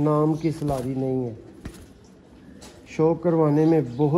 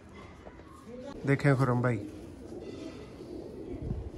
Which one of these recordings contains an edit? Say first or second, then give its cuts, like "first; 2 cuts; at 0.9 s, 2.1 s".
second; 1 cut; at 1.1 s